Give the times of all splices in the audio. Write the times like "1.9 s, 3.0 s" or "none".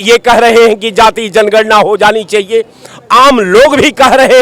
none